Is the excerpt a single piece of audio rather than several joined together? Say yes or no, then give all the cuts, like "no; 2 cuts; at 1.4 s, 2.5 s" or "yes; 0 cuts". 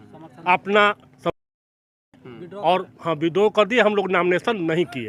yes; 0 cuts